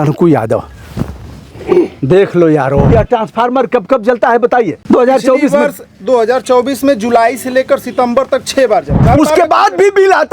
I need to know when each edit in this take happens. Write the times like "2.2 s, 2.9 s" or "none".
2.9 s, 4.8 s, 9.1 s